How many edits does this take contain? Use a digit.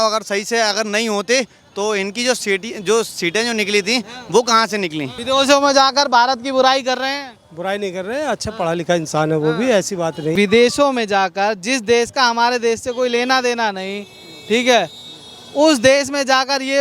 2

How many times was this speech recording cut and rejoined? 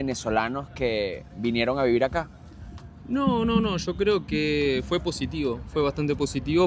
0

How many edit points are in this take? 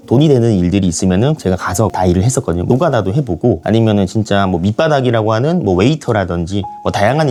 0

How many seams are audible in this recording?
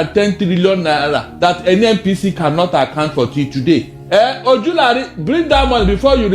1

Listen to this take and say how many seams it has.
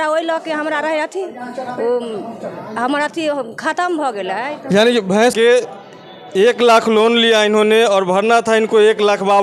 1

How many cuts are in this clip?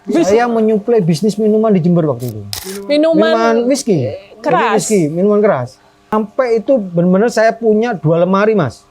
1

